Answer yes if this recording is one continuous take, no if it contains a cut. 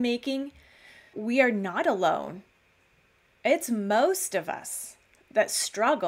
no